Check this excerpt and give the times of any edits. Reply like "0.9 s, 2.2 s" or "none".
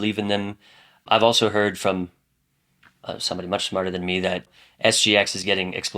1.0 s, 4.5 s